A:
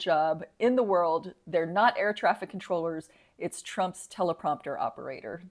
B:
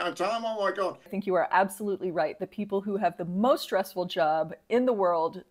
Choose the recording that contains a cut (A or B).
B